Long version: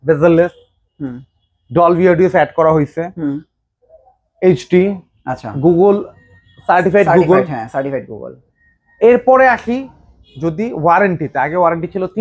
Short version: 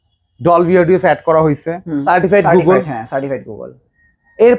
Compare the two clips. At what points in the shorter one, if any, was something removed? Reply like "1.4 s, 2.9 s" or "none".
1.9 s